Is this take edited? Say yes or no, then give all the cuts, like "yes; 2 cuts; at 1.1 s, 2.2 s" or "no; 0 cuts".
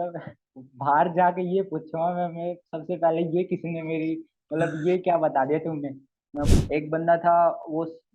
yes; 1 cut; at 6.5 s